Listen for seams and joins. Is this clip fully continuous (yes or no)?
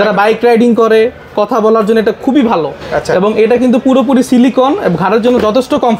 yes